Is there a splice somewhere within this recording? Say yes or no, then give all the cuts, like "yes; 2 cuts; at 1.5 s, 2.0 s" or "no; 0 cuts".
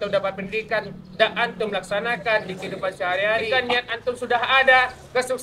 yes; 1 cut; at 3.5 s